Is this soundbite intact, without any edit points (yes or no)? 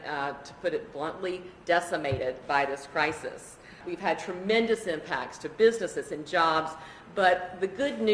no